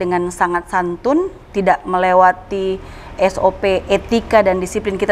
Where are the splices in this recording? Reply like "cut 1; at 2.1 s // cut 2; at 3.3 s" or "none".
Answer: none